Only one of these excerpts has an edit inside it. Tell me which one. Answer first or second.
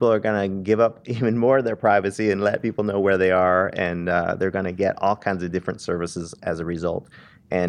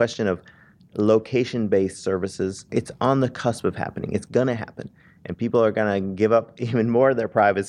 second